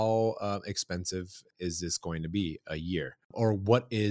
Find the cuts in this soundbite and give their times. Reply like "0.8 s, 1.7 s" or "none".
1.5 s, 3.2 s